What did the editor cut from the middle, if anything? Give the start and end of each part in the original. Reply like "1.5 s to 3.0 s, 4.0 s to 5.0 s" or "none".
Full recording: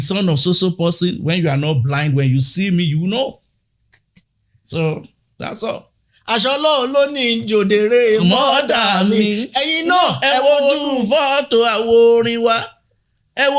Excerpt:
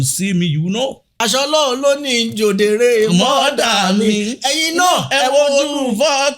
3.4 s to 6.2 s